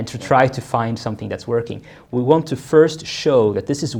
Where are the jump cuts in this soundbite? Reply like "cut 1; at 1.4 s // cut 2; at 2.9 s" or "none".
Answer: none